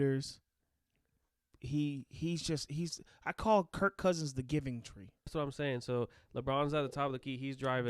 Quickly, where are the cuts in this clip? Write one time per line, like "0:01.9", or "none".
0:05.3